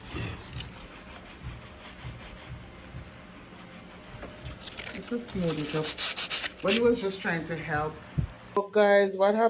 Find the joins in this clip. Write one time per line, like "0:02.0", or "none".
0:08.6